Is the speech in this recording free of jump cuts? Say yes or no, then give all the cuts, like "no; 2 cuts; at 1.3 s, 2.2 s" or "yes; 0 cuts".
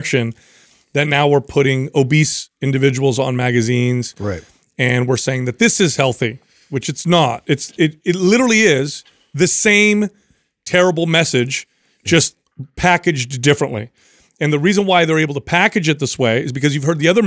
yes; 0 cuts